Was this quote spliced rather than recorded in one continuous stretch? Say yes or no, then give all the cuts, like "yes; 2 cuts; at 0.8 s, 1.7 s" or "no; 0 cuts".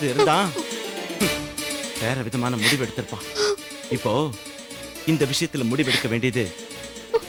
no; 0 cuts